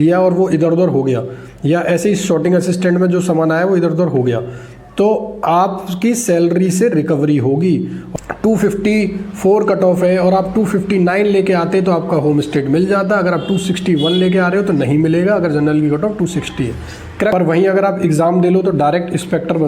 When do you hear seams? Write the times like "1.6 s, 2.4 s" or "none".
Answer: 8.0 s, 17.3 s